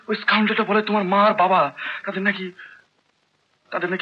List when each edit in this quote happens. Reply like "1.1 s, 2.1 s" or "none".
none